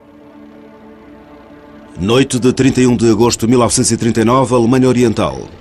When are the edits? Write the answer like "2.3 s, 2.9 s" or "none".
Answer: 2.0 s